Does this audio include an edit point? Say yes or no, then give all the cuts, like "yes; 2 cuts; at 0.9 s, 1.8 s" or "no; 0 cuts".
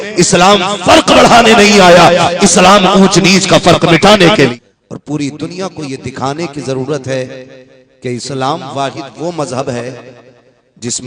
yes; 1 cut; at 4.5 s